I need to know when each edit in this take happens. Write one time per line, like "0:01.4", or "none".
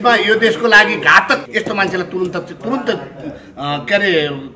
0:01.4